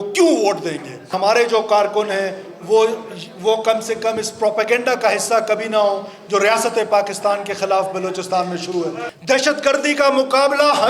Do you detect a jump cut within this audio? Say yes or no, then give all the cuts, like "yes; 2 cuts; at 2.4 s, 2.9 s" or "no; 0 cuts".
yes; 2 cuts; at 1.1 s, 9.1 s